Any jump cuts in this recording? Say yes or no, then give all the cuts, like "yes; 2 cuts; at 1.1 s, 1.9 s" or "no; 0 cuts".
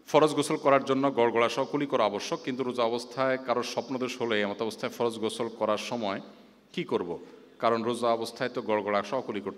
no; 0 cuts